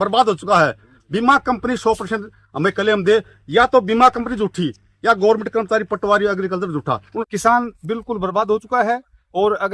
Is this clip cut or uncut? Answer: cut